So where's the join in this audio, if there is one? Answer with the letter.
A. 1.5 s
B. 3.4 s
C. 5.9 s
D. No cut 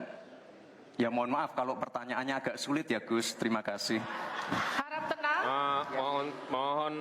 A